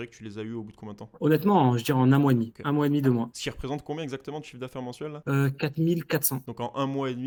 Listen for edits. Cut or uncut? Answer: uncut